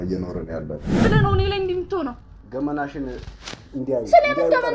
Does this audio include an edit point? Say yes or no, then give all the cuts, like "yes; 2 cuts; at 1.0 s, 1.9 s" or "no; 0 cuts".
yes; 1 cut; at 1.0 s